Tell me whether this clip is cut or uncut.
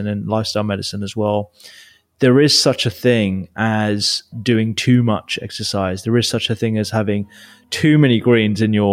cut